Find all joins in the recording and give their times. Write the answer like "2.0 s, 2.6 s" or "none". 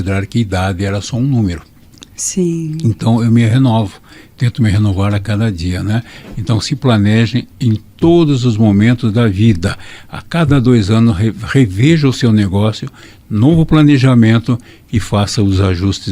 6.2 s

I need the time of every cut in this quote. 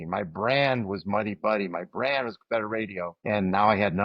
3.1 s

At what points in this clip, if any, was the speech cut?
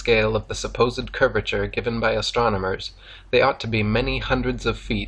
none

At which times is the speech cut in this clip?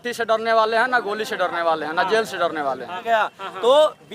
3.0 s

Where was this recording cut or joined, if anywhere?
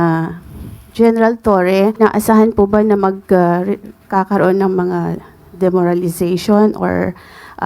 1.9 s

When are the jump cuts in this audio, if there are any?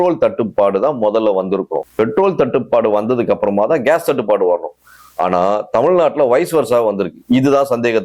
1.8 s

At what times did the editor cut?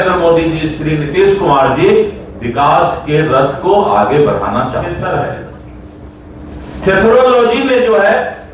4.9 s

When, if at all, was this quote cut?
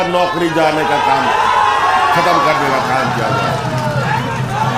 none

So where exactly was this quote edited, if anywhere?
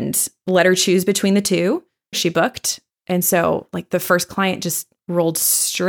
2.2 s

